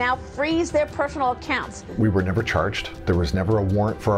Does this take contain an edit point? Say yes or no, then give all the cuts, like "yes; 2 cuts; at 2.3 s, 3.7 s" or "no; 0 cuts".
yes; 2 cuts; at 1.8 s, 2.9 s